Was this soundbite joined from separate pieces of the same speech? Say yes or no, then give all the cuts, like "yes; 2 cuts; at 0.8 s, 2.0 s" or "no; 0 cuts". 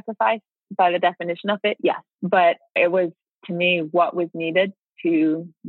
yes; 2 cuts; at 2.1 s, 2.8 s